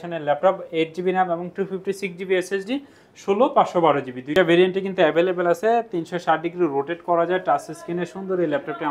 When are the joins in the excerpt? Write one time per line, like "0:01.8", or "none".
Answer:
0:04.3